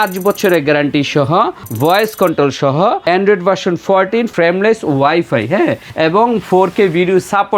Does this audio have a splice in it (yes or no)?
yes